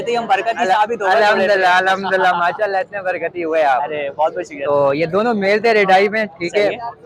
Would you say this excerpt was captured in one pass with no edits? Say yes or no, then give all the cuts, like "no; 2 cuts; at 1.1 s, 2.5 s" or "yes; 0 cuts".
yes; 0 cuts